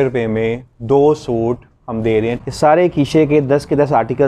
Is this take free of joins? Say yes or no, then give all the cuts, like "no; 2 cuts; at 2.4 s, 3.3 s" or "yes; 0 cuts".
no; 1 cut; at 2.3 s